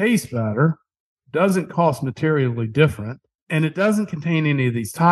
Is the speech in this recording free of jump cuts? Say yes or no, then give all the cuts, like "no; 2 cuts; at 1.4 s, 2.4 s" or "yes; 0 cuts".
no; 1 cut; at 3.3 s